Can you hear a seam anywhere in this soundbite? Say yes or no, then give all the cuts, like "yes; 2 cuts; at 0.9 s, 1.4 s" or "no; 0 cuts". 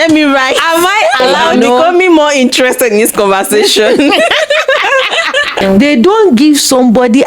yes; 2 cuts; at 1.4 s, 5.5 s